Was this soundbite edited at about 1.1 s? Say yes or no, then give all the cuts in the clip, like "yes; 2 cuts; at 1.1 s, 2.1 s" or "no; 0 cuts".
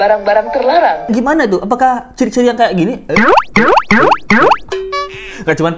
yes; 1 cut; at 1.1 s